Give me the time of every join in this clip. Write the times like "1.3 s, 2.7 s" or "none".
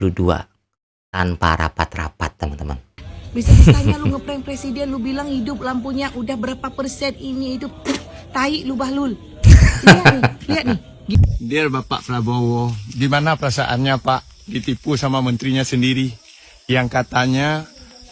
3.0 s, 11.1 s